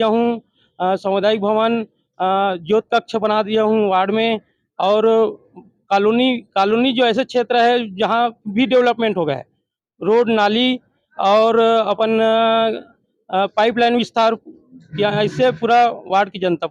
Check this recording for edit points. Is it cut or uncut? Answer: uncut